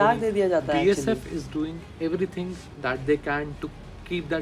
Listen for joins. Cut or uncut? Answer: uncut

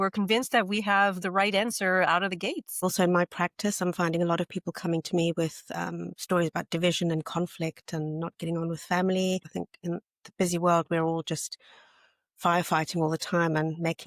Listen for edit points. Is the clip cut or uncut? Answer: cut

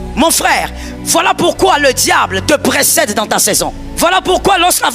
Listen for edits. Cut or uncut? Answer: cut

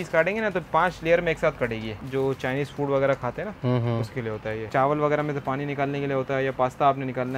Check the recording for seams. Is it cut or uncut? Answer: cut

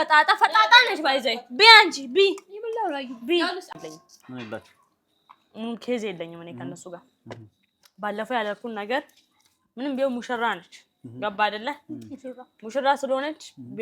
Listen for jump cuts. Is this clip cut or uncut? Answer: cut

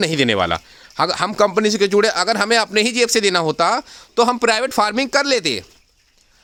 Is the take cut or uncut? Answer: uncut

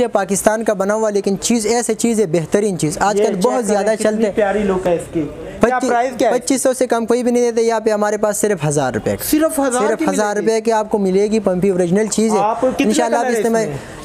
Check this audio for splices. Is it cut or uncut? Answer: uncut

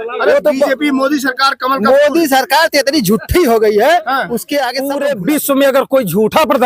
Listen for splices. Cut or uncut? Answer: cut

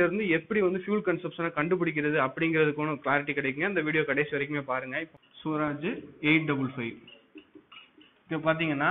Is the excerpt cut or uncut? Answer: cut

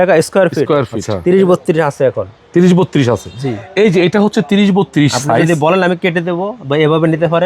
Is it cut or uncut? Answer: cut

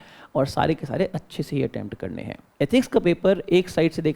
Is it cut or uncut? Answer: cut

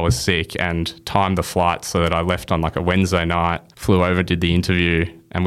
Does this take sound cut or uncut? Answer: cut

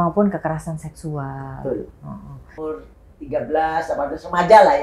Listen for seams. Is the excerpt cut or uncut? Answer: cut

